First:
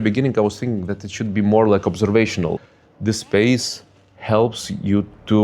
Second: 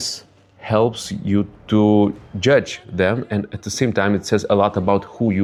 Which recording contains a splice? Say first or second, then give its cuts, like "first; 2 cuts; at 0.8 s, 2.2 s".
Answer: first; 1 cut; at 2.6 s